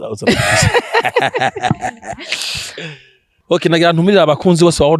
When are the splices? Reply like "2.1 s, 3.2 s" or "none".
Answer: 3.3 s